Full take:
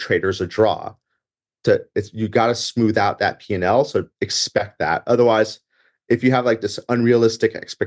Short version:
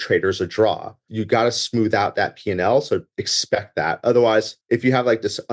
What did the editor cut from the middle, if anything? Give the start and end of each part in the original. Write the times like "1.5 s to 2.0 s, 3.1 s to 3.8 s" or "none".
1.1 s to 2.1 s, 5.6 s to 5.9 s